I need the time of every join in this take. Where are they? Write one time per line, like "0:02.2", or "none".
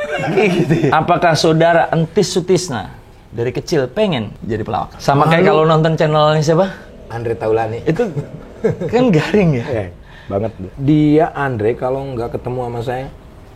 0:00.9
0:04.9
0:10.7